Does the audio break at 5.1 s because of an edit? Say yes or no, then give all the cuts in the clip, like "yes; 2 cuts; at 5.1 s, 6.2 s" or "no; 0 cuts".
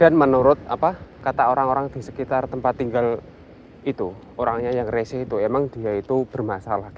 no; 1 cut; at 1.1 s